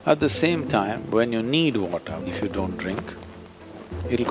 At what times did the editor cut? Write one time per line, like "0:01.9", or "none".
0:02.2